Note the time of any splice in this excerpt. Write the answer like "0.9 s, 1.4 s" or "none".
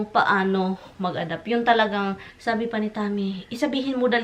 2.3 s